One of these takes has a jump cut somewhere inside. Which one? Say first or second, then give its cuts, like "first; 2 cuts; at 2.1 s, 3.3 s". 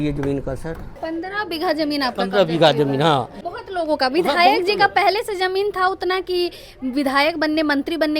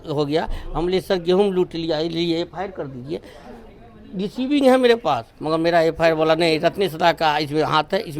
first; 1 cut; at 0.9 s